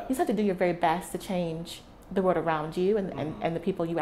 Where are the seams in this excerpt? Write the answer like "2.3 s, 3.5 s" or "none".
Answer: none